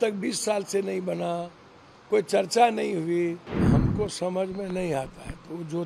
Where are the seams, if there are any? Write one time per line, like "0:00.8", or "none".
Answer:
0:03.6